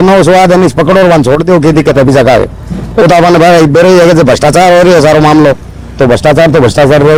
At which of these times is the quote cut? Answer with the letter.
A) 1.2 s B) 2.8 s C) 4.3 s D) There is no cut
D